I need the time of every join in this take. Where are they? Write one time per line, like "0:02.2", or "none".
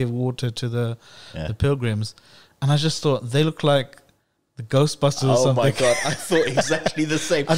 none